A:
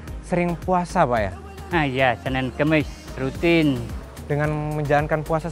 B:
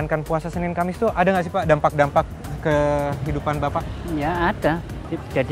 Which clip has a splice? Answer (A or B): A